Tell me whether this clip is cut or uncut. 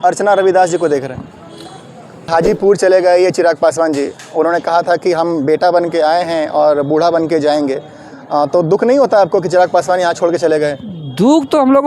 cut